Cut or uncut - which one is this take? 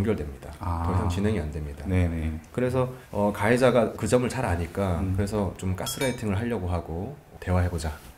cut